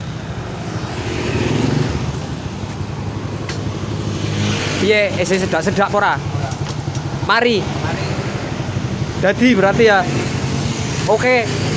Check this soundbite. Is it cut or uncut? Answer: uncut